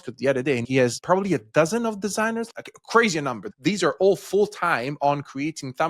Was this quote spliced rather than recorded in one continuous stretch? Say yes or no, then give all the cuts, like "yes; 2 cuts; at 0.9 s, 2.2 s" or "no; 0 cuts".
yes; 3 cuts; at 0.8 s, 2.5 s, 3.5 s